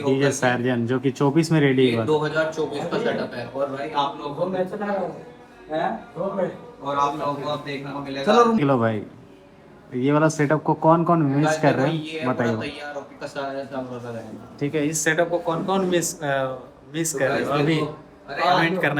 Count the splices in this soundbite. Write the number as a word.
zero